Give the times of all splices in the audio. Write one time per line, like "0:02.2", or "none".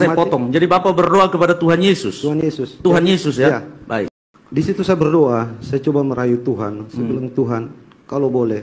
0:04.1